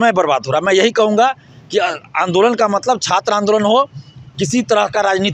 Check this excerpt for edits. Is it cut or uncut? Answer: uncut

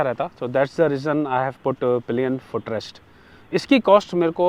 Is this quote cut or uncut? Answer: uncut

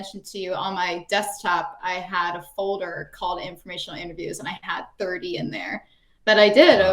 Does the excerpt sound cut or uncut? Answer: uncut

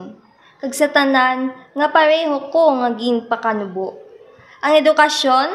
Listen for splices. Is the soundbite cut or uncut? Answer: uncut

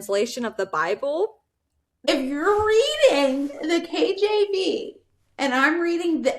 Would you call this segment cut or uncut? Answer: cut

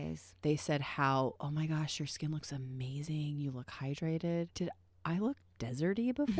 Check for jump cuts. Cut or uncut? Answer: cut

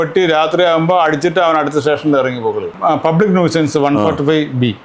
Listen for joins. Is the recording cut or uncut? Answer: cut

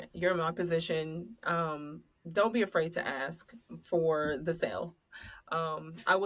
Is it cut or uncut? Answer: uncut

